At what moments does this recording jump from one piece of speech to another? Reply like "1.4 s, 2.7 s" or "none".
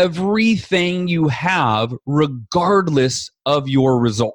none